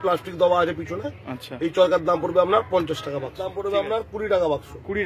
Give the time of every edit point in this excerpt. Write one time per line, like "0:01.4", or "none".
0:03.5